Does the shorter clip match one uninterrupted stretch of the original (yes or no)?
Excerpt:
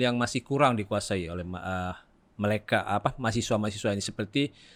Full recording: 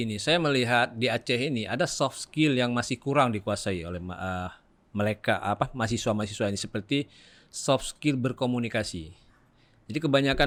yes